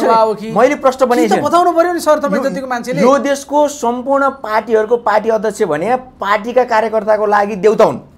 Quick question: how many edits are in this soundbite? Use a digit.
0